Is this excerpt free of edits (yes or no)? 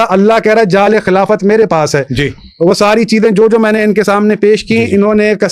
yes